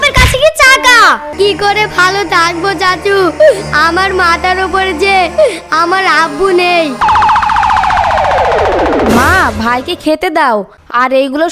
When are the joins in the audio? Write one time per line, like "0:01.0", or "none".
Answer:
0:01.3
0:07.0